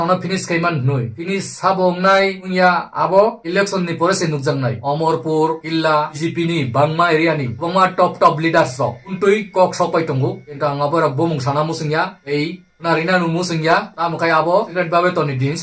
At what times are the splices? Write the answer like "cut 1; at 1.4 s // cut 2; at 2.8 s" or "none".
cut 1; at 6.2 s // cut 2; at 14.7 s